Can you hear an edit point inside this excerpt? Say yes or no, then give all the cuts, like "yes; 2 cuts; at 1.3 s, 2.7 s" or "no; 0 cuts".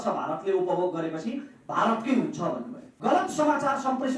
yes; 1 cut; at 2.9 s